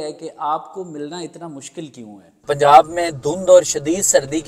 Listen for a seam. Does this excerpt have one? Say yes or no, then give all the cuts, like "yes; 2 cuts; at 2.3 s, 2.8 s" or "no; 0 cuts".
yes; 1 cut; at 2.4 s